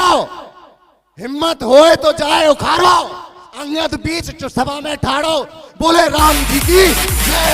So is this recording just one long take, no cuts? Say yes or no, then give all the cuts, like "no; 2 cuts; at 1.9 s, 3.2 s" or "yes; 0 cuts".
yes; 0 cuts